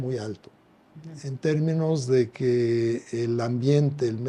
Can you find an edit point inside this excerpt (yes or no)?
no